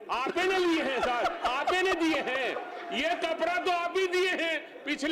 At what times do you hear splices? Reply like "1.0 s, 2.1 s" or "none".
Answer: none